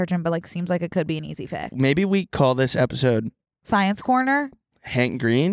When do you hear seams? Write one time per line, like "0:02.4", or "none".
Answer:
0:01.7

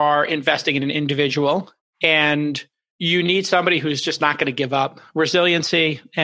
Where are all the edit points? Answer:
0:01.8

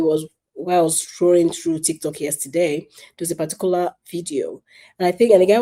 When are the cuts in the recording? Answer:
none

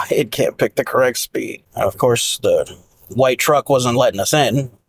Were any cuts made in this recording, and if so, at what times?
0:01.6

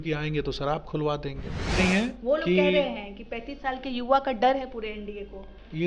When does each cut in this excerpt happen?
0:01.8

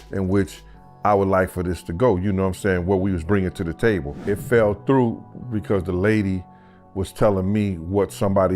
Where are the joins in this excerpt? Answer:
0:04.2

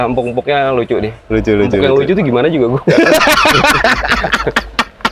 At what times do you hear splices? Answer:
none

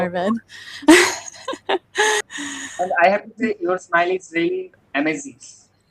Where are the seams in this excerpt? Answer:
0:02.2
0:04.8

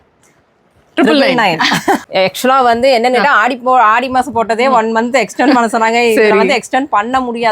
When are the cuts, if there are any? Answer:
0:02.0

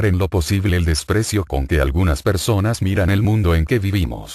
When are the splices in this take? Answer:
none

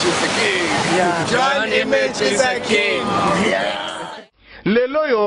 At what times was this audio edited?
0:03.9

